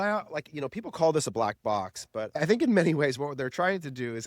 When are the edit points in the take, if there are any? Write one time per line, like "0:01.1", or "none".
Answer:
0:02.4